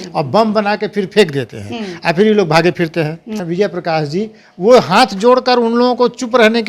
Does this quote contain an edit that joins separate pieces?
yes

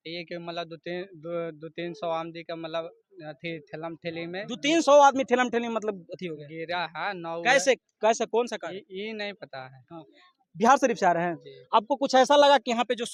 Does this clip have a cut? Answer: no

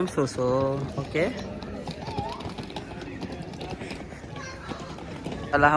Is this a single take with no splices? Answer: yes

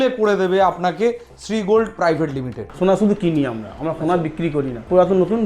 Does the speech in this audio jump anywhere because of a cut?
yes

